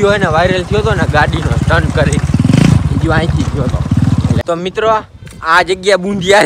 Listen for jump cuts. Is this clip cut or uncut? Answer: cut